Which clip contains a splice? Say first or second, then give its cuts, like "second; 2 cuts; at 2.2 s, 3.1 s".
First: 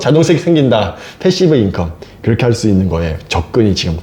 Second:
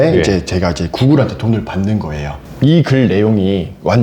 second; 1 cut; at 2.4 s